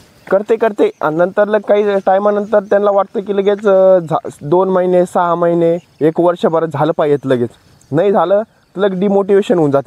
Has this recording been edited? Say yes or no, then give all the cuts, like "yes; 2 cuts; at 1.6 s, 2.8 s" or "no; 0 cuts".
no; 0 cuts